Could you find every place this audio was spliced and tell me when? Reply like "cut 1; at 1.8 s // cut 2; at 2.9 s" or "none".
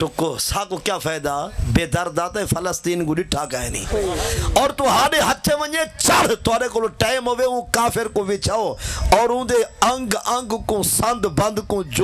cut 1; at 4.4 s